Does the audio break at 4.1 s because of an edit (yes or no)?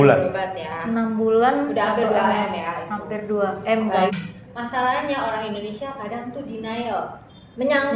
yes